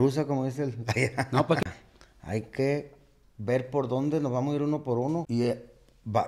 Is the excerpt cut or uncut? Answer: cut